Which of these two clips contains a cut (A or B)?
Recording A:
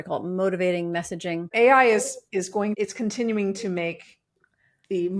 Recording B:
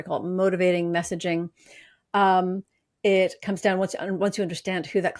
A